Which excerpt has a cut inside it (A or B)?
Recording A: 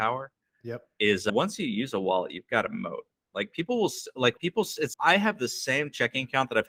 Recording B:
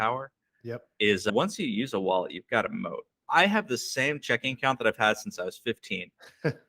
B